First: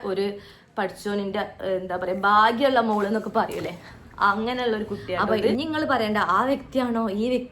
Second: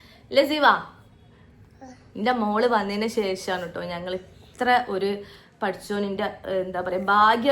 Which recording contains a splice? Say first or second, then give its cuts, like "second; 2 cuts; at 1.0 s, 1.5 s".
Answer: first; 1 cut; at 5.3 s